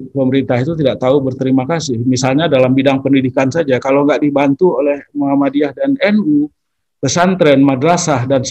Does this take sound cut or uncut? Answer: uncut